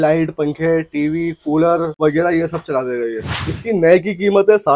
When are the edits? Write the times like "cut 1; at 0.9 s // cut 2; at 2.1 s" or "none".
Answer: cut 1; at 1.9 s // cut 2; at 3.4 s